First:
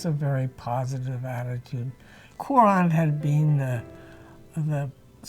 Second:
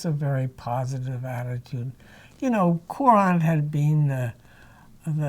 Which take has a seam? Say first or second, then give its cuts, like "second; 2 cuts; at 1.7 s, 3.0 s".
first; 1 cut; at 2.3 s